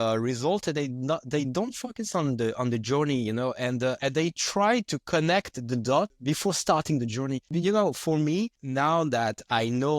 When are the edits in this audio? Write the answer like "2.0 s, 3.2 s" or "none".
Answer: 4.0 s, 6.2 s, 7.5 s, 8.6 s